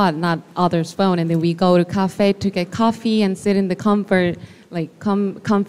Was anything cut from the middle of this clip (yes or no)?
no